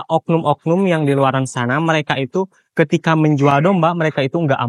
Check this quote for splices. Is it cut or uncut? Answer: uncut